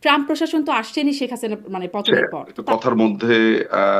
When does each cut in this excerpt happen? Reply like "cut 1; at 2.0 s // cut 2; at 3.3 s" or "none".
cut 1; at 2.6 s